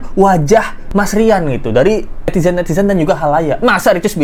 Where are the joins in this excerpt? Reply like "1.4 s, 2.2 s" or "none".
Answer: none